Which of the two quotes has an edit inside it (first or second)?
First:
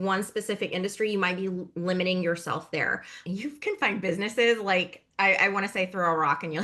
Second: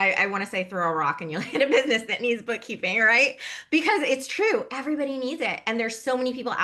first